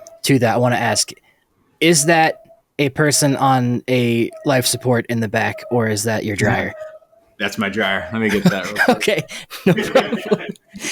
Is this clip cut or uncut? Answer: uncut